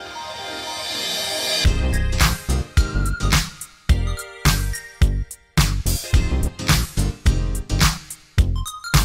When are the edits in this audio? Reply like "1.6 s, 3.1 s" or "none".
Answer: none